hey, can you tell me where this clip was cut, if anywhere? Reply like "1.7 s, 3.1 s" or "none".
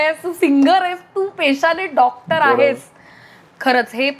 none